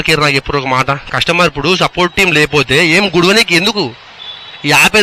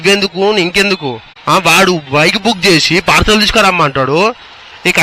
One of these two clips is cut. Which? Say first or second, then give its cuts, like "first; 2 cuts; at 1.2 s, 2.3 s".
second; 1 cut; at 1.3 s